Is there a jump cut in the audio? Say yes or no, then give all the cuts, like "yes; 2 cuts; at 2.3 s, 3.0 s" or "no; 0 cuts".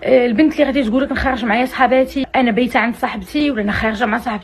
yes; 2 cuts; at 2.2 s, 3.4 s